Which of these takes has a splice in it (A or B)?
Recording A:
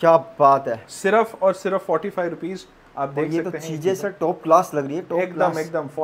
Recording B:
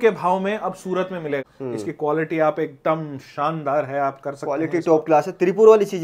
B